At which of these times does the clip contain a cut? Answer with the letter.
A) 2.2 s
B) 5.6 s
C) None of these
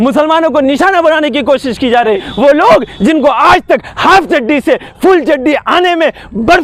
A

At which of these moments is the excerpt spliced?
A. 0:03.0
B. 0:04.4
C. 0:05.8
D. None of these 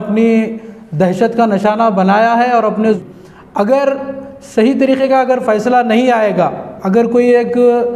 A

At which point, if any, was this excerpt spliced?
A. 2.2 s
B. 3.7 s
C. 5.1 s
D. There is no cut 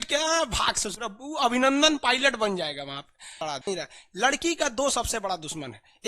B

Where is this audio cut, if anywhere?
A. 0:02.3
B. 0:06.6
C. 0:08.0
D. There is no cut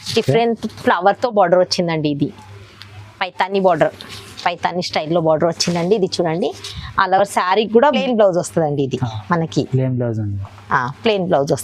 C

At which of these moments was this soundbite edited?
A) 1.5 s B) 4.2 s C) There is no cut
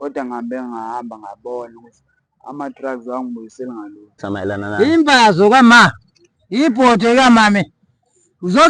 B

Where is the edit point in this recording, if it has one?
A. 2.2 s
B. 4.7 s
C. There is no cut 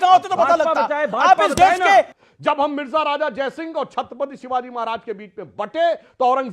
A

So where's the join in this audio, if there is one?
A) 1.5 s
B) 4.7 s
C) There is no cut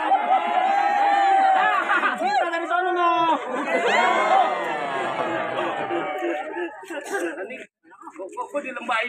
B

